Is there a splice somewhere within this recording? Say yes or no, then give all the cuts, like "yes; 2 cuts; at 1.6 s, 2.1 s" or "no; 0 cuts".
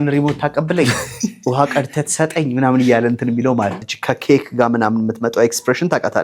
yes; 1 cut; at 3.9 s